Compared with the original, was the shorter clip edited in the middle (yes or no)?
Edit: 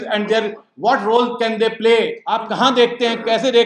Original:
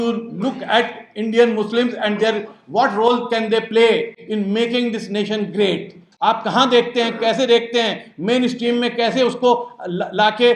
yes